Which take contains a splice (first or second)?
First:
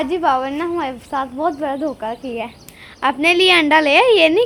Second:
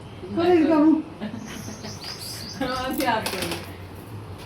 second